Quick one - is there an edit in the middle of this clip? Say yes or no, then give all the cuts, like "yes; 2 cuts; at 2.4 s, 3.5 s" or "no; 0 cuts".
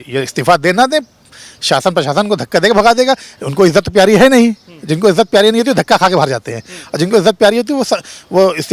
no; 0 cuts